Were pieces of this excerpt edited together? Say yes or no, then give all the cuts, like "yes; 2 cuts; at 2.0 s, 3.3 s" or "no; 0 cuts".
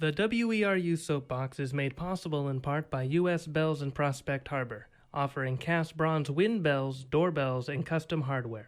no; 0 cuts